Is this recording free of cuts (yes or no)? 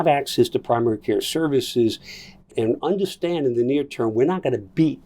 no